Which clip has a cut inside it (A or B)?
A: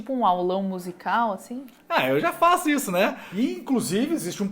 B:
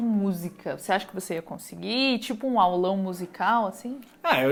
A